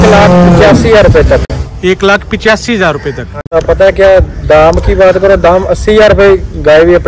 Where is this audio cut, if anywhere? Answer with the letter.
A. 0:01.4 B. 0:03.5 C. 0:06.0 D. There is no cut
B